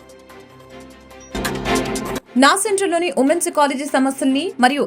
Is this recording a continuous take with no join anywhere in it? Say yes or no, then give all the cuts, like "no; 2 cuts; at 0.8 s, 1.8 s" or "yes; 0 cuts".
no; 2 cuts; at 1.3 s, 2.3 s